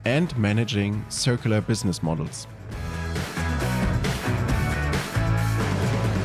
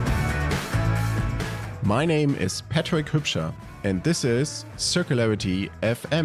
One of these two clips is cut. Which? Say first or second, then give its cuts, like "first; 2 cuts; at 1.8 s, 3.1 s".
second; 1 cut; at 1.1 s